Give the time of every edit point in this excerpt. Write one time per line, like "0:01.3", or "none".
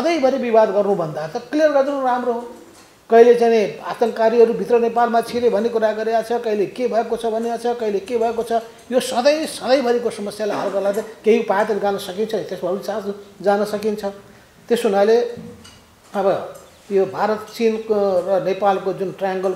none